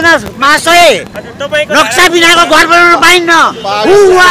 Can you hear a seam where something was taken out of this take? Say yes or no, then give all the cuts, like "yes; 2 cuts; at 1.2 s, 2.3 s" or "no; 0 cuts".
no; 0 cuts